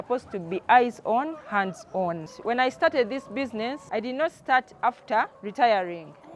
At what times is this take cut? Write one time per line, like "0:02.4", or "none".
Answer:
0:02.3
0:03.8
0:05.4